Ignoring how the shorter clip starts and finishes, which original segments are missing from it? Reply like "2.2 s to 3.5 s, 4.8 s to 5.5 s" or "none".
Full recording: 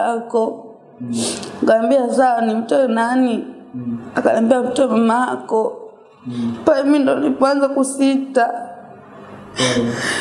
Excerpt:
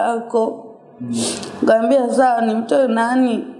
none

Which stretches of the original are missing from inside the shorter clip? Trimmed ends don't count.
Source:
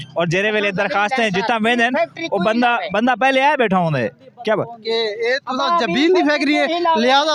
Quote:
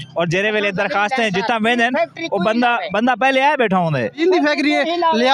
4.2 s to 6.0 s

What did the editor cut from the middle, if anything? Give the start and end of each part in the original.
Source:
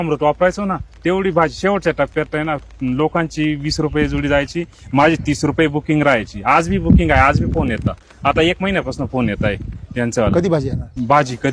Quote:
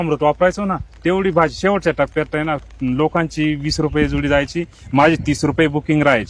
none

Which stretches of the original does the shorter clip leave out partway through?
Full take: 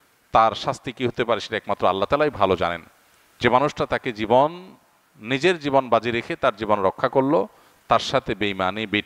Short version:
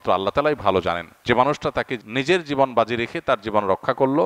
2.8 s to 3.2 s, 4.1 s to 5.1 s

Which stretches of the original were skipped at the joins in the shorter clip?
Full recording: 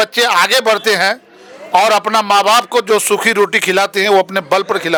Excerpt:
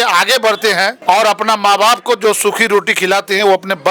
1.2 s to 1.6 s

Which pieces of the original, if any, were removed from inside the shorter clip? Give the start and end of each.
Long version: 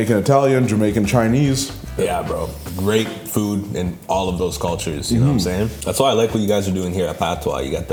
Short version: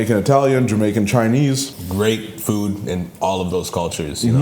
1.8 s to 2.6 s

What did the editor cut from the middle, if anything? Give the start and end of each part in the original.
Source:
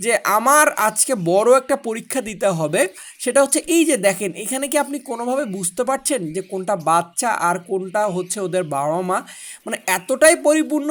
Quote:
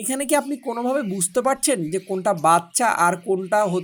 none

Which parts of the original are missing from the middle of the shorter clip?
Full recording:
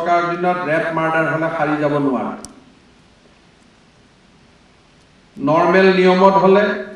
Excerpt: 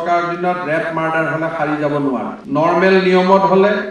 2.4 s to 5.3 s

